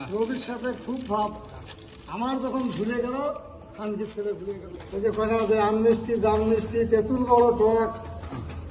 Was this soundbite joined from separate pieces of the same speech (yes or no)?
yes